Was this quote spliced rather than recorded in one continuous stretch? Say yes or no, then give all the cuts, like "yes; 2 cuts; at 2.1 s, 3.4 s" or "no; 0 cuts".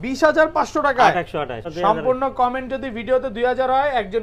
yes; 1 cut; at 1.6 s